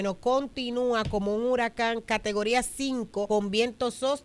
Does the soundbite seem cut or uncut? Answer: cut